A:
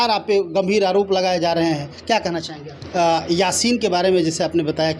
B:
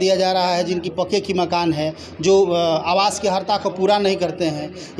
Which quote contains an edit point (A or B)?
A